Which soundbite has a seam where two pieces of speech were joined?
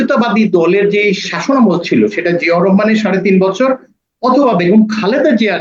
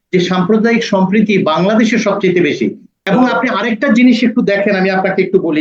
second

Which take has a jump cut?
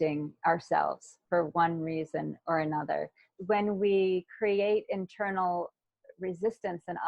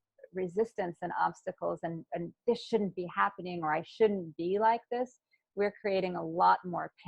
first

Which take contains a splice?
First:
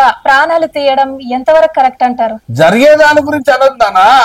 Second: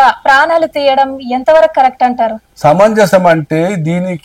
first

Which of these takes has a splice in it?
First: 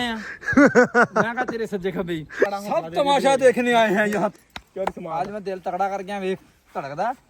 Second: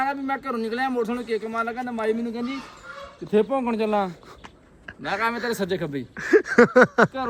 first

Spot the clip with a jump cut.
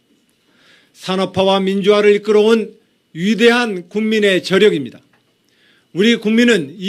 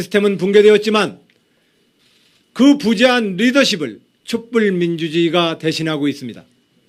first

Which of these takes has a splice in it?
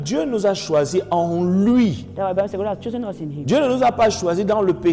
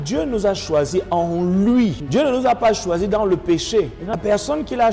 second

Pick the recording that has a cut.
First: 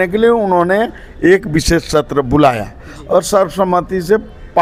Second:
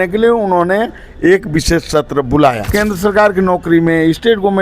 second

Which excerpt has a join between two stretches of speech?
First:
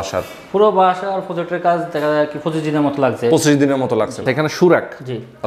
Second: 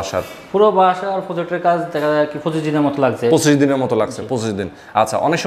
first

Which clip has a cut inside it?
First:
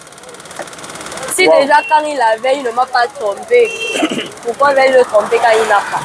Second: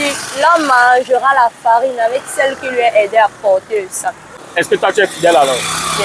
second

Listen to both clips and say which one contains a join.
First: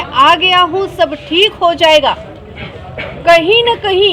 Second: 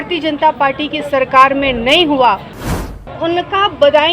second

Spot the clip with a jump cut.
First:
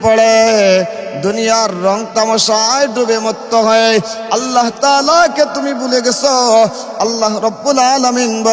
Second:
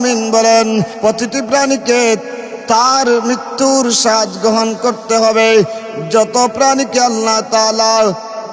second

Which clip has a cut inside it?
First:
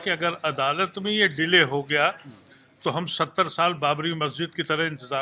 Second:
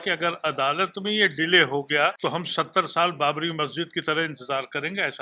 second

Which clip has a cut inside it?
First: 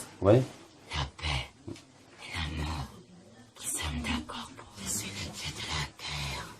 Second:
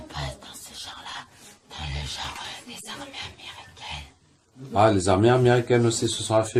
first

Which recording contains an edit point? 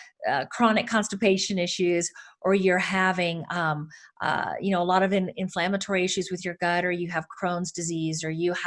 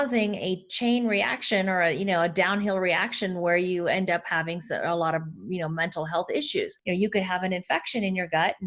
second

